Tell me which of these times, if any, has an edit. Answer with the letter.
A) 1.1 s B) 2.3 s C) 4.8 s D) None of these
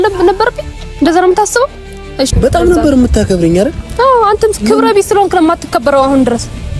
B